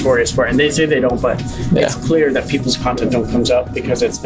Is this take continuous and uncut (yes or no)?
yes